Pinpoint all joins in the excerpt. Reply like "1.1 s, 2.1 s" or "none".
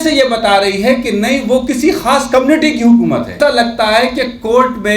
3.4 s